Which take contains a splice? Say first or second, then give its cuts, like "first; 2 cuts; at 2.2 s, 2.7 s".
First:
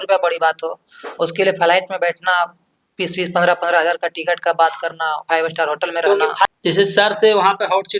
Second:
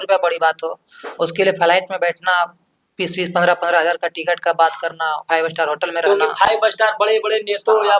first; 1 cut; at 6.5 s